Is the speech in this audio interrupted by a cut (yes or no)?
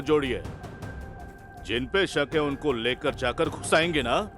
no